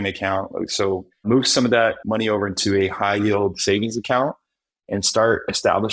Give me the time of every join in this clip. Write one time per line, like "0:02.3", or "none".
0:01.1